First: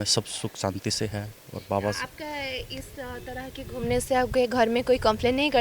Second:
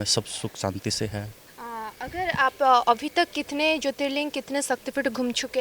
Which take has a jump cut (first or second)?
second